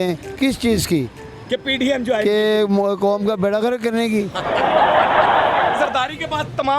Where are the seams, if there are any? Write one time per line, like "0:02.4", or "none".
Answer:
0:05.8